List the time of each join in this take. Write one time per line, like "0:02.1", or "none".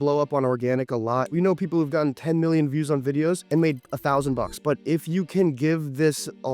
0:01.3
0:04.6